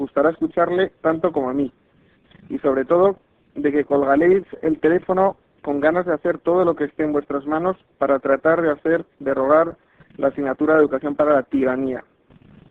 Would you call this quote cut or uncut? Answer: cut